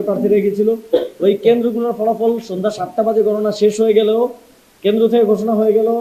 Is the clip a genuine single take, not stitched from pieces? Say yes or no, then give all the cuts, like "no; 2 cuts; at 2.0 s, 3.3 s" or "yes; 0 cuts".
yes; 0 cuts